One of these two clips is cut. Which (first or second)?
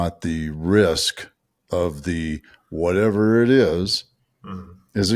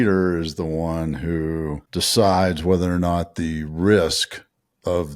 second